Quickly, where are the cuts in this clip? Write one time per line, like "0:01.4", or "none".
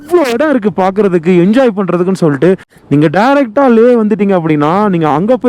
none